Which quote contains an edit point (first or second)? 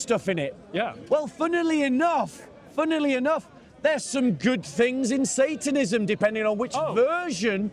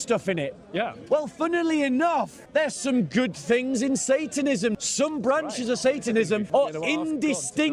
second